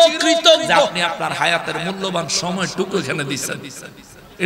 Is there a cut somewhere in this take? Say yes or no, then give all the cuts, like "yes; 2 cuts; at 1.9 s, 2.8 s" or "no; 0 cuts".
yes; 1 cut; at 0.9 s